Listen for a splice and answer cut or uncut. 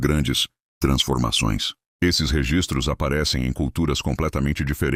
uncut